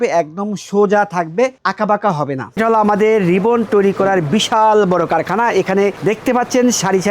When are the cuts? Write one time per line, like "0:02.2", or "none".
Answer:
0:02.6